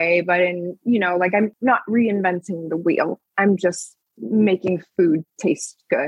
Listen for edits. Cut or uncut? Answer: cut